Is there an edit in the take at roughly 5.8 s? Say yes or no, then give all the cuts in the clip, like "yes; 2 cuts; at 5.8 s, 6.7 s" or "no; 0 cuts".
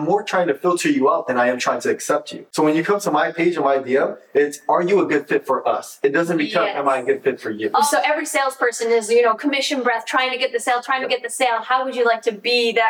no; 2 cuts; at 2.4 s, 7.9 s